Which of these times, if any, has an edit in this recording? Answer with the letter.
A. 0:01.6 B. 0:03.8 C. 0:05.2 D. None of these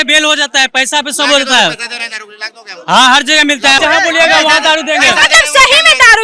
B